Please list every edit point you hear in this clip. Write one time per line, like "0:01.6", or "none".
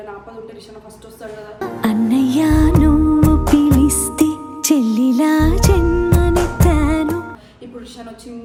none